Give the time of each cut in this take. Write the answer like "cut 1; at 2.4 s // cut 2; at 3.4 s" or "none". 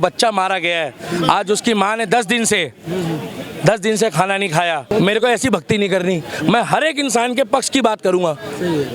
cut 1; at 4.9 s